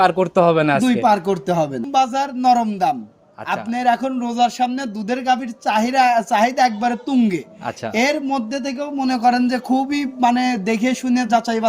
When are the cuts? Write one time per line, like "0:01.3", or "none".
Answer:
0:01.8